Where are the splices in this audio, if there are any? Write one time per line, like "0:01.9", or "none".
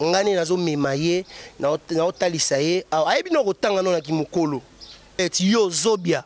0:05.2